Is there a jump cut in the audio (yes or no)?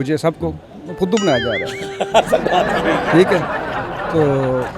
no